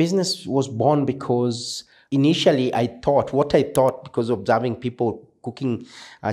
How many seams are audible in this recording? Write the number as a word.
one